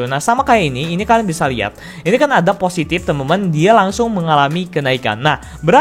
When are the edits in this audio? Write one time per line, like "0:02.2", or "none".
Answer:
none

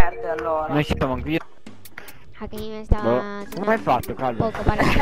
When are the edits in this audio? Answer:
none

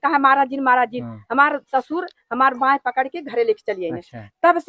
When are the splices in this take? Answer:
none

